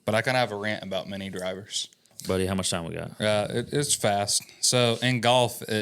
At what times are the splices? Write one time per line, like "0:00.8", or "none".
0:02.1